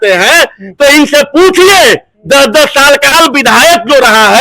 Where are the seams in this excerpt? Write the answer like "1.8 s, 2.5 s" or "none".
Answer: 3.1 s